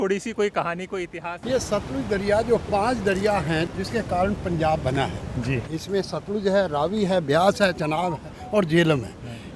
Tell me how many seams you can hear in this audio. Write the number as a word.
three